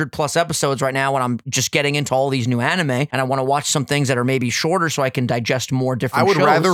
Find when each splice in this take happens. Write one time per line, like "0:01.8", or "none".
0:03.1

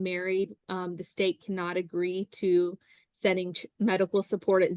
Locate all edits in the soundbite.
none

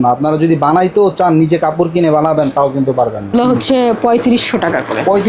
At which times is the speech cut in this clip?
0:03.2

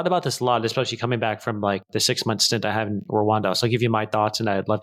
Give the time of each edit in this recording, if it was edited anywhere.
none

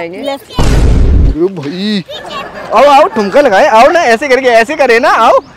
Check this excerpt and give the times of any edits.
none

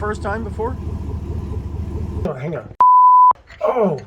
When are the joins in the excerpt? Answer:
0:02.7

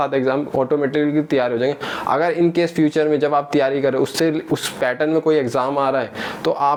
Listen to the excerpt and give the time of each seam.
none

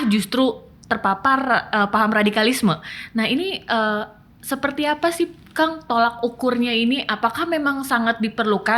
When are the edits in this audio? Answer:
none

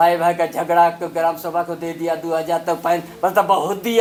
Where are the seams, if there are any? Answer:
none

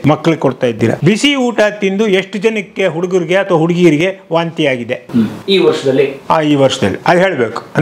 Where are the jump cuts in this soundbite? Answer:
none

